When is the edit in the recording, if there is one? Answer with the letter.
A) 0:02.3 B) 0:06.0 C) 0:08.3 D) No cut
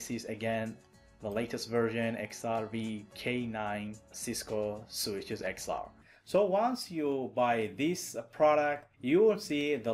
B